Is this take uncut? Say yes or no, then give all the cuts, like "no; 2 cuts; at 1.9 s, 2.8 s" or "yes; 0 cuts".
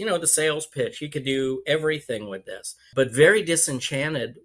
no; 1 cut; at 2.9 s